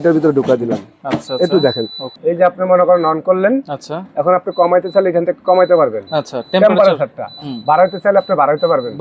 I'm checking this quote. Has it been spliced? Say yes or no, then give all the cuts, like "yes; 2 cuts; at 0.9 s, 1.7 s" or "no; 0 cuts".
yes; 1 cut; at 2.0 s